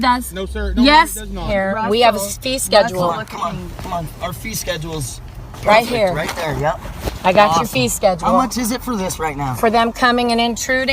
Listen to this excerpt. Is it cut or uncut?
cut